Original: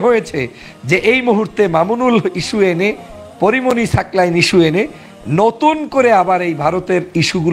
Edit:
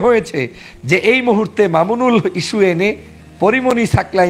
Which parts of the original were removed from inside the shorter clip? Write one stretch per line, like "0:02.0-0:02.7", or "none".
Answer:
none